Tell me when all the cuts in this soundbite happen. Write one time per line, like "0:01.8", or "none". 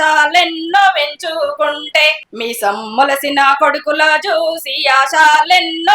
0:02.3